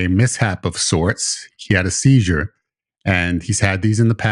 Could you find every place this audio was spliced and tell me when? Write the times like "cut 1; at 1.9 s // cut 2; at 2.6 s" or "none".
cut 1; at 1.6 s